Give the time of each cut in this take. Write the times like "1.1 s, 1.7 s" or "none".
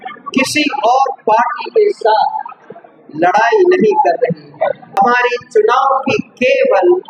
5.0 s